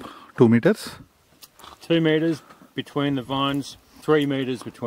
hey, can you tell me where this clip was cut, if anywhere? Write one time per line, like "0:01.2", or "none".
0:03.9